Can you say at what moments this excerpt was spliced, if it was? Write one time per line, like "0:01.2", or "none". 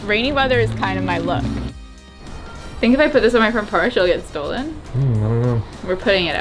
0:01.9
0:04.8